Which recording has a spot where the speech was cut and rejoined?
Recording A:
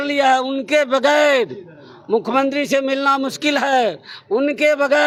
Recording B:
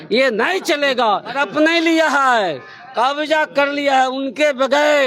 B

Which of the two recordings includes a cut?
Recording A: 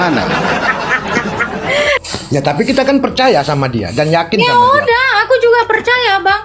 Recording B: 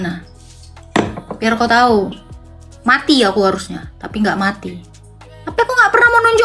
A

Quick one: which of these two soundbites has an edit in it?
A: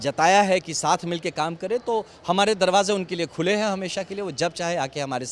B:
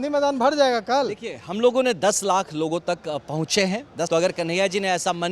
B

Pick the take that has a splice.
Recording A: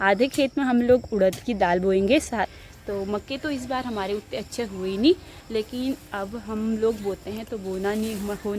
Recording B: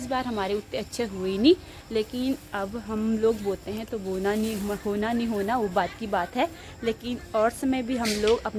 A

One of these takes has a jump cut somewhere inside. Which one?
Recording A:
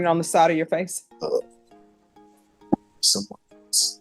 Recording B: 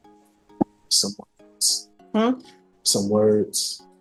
A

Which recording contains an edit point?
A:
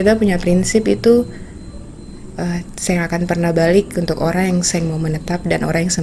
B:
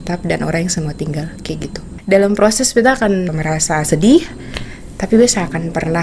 B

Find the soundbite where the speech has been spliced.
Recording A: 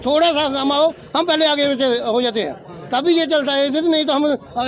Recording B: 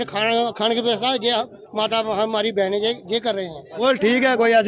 B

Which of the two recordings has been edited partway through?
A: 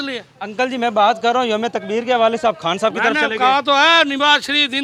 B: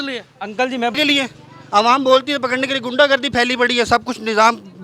B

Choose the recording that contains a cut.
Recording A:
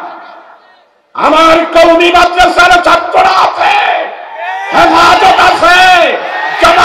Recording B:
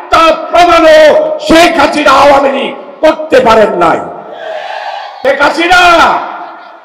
B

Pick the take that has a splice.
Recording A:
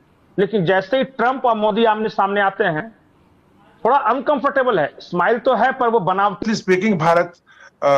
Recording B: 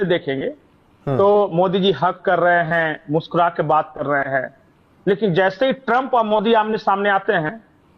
A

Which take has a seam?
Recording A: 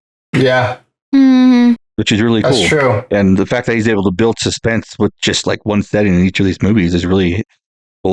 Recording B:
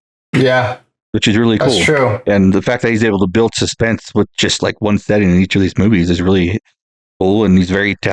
B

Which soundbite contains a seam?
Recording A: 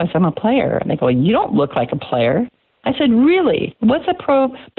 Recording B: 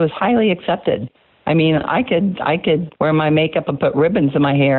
B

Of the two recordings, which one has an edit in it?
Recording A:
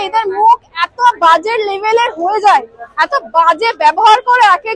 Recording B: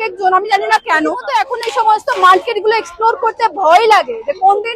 B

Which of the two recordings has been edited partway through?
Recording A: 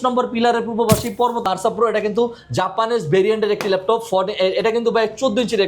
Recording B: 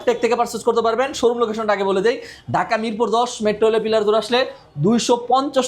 A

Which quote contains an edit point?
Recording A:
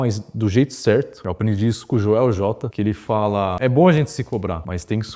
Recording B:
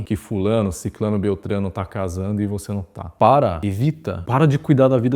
B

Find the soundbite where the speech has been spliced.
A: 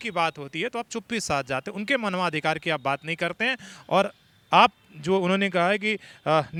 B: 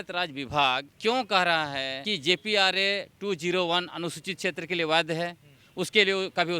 B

